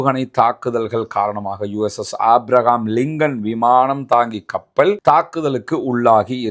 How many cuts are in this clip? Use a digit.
0